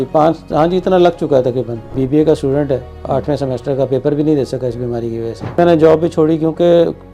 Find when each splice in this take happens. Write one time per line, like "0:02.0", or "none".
0:01.8
0:05.4